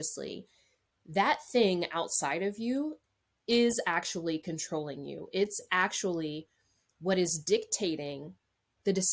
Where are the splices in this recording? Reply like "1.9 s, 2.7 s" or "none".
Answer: none